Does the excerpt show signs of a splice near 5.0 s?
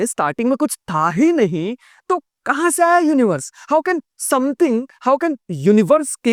no; 0 cuts

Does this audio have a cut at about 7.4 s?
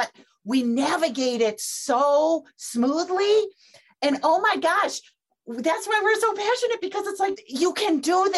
yes; 1 cut; at 7.4 s

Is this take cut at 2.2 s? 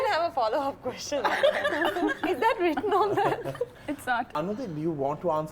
no; 1 cut; at 4.3 s

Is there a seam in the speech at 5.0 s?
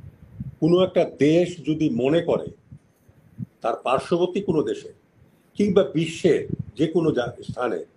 no; 0 cuts

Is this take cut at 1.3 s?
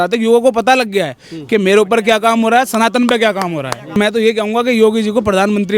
no; 1 cut; at 3.9 s

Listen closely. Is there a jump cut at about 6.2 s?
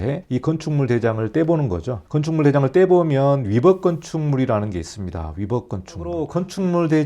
yes; 1 cut; at 6.2 s

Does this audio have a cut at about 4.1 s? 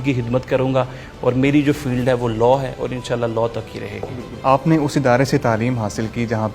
yes; 1 cut; at 4.1 s

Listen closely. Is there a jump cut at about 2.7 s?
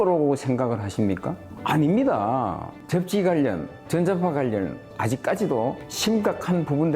yes; 1 cut; at 2.7 s

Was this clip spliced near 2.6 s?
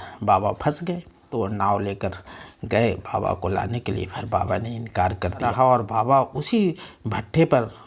no; 2 cuts; at 1.2 s, 5.4 s

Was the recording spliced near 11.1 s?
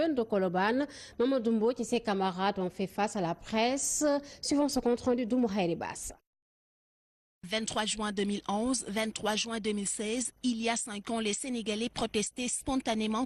yes; 1 cut; at 11.1 s

